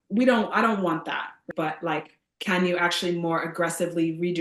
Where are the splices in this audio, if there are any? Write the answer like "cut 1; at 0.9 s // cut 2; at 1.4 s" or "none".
cut 1; at 1.5 s